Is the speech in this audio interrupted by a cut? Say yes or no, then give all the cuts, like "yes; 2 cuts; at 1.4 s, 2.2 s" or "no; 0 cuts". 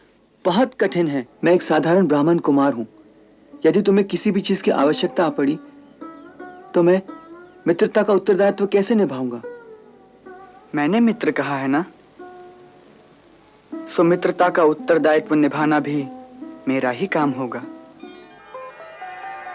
yes; 1 cut; at 1.3 s